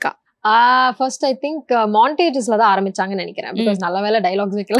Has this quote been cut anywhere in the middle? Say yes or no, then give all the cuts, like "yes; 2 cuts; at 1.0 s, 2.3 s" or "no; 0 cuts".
no; 0 cuts